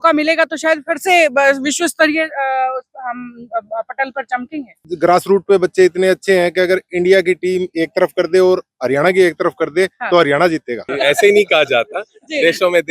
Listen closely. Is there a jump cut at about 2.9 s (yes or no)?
no